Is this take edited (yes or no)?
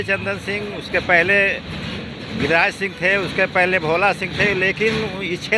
no